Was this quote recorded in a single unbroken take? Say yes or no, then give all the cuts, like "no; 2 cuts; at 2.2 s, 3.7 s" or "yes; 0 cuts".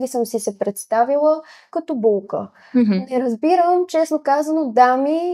yes; 0 cuts